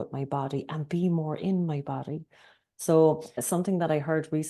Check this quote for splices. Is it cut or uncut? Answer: cut